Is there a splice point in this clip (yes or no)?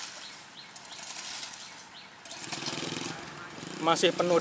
yes